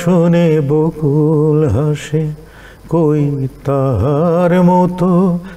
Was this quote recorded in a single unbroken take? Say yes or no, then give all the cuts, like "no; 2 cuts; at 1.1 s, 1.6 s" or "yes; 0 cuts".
yes; 0 cuts